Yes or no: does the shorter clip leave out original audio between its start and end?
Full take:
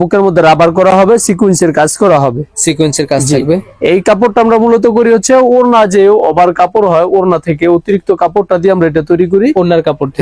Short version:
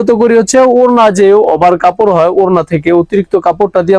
no